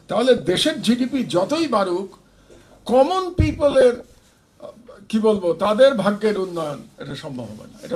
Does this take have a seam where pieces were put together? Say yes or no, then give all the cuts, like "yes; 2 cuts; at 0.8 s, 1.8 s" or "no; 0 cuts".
no; 0 cuts